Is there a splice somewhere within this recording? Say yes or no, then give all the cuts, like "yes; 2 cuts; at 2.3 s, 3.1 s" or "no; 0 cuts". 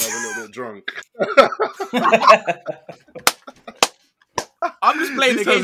yes; 1 cut; at 4.5 s